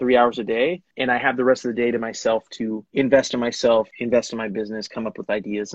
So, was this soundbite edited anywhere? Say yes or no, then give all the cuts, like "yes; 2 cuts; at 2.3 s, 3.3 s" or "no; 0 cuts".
yes; 3 cuts; at 0.9 s, 2.8 s, 3.9 s